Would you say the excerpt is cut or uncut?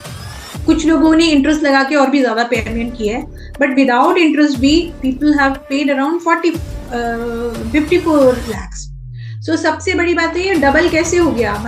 uncut